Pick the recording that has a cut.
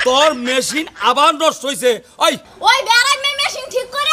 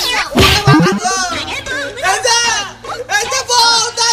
first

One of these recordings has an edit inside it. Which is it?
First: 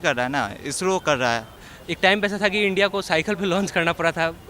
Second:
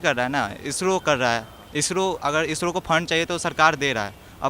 first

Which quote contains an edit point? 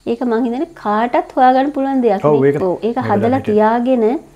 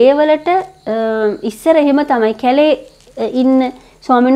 first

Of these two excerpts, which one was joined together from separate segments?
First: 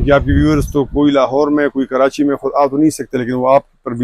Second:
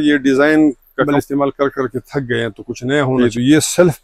second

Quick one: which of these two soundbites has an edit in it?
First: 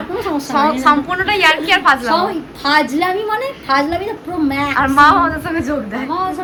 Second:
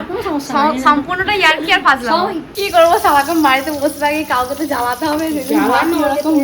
second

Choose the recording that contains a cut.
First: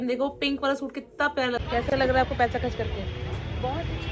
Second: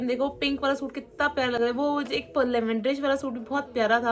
first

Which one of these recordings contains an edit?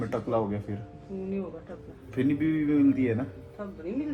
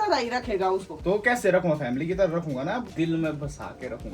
second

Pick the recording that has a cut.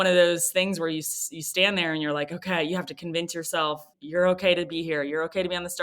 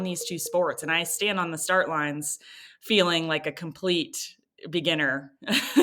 first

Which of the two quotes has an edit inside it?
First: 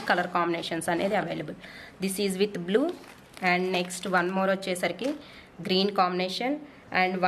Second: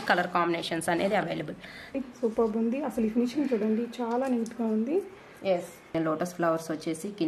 second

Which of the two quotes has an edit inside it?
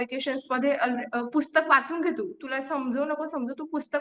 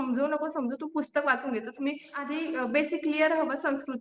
second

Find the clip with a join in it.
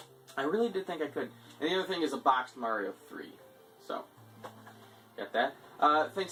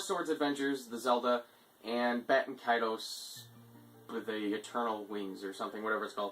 second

